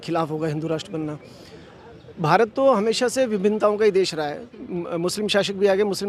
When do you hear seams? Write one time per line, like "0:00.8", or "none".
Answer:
none